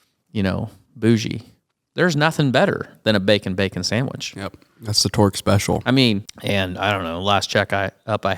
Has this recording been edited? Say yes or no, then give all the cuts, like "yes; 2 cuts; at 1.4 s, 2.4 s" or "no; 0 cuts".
yes; 1 cut; at 6.3 s